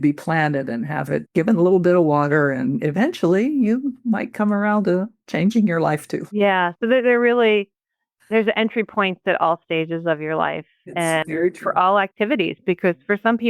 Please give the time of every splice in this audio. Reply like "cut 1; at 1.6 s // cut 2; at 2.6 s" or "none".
cut 1; at 1.3 s // cut 2; at 6.2 s